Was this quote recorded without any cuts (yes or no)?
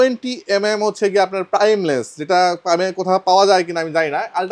yes